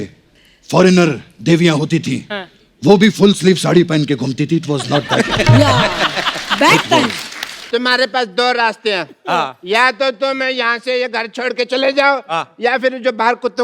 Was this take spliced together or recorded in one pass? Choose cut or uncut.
cut